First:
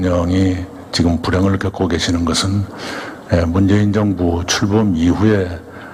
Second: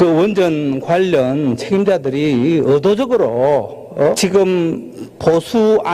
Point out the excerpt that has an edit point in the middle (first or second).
second